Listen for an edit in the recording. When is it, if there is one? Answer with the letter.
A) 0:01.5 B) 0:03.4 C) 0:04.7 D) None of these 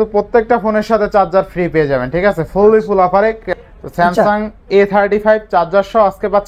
B